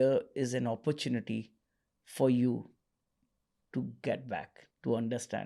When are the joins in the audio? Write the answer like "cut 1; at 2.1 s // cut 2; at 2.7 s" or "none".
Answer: none